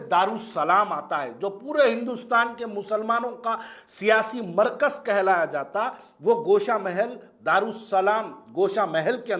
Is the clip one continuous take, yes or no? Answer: yes